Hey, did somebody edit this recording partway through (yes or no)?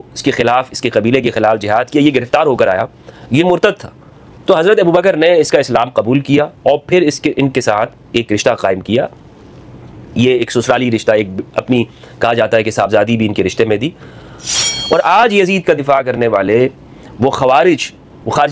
yes